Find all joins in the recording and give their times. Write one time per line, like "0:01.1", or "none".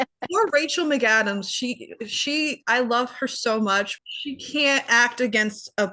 0:04.0

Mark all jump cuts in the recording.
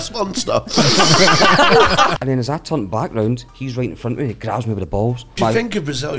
0:02.1
0:03.6
0:05.4

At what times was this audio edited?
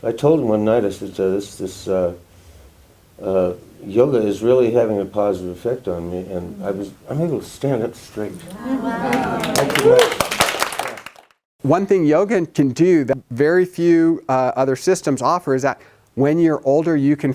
0:11.4
0:12.9

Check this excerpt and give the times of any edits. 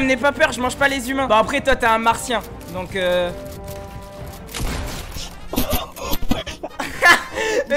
none

